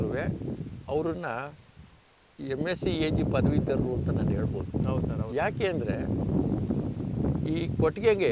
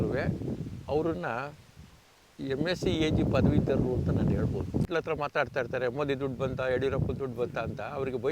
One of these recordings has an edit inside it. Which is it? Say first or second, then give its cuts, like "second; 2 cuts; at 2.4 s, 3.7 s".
second; 1 cut; at 4.9 s